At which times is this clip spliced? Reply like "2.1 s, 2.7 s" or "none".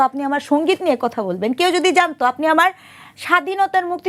none